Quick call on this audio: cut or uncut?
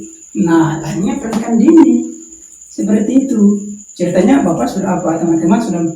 uncut